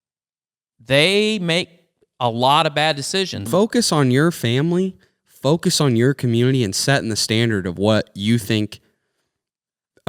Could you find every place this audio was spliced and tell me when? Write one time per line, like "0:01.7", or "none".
0:03.5